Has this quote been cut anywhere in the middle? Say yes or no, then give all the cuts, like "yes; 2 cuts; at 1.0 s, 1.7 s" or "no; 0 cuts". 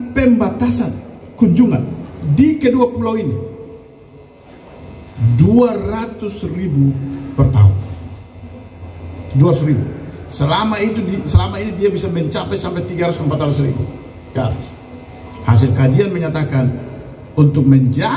no; 0 cuts